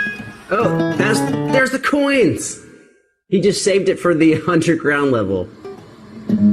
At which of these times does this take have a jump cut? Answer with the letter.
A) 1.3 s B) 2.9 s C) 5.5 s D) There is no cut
C